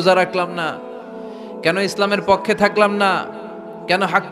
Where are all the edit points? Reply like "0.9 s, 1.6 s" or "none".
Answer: none